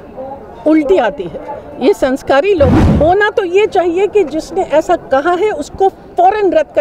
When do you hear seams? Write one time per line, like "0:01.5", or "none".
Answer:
0:02.8